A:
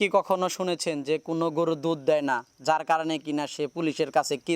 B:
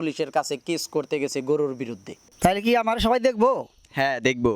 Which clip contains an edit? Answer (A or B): B